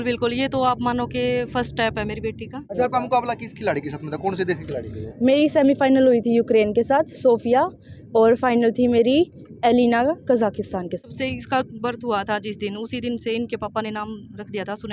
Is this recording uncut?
no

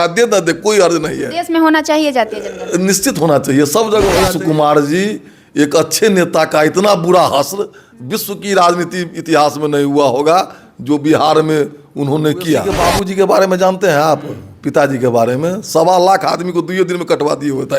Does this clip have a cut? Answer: yes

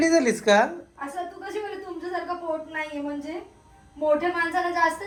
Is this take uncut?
yes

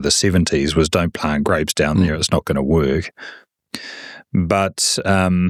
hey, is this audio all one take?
yes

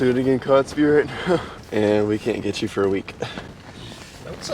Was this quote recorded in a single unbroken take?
no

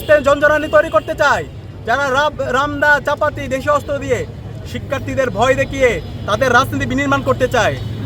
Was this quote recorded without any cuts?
yes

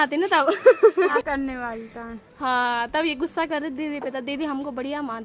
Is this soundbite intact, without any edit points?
yes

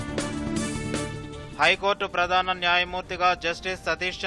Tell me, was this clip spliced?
yes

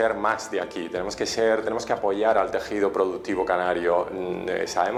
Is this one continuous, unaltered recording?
yes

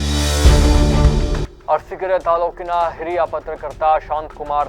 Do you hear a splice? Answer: yes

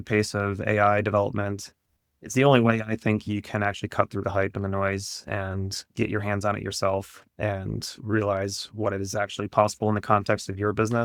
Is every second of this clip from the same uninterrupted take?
yes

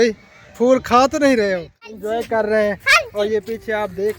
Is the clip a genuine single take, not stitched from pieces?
no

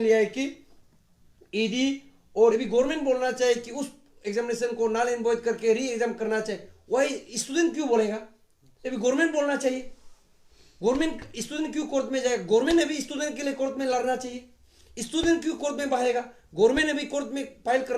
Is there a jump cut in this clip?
yes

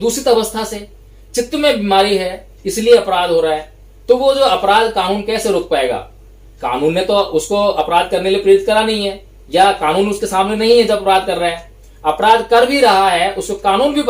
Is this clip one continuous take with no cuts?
yes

